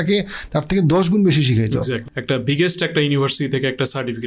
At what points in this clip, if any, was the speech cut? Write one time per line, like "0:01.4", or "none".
0:02.1